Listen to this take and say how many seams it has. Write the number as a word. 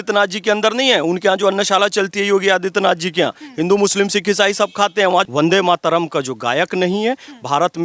one